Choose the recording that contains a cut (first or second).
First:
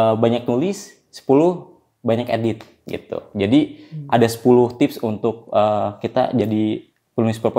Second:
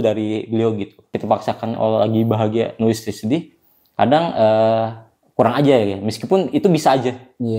second